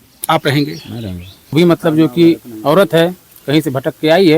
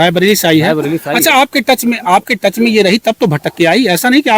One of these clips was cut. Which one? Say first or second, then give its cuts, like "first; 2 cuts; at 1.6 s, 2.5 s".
first; 1 cut; at 1.5 s